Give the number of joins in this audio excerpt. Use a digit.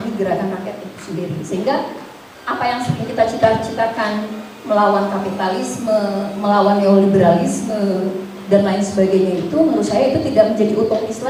0